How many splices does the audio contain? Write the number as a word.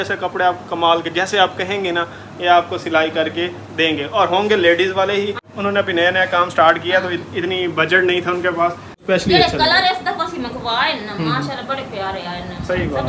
two